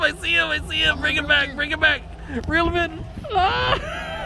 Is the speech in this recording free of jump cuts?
yes; 0 cuts

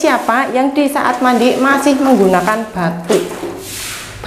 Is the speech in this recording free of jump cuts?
yes; 0 cuts

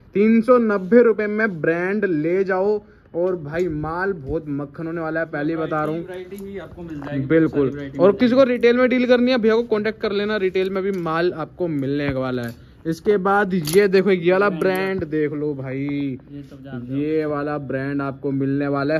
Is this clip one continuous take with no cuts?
yes; 0 cuts

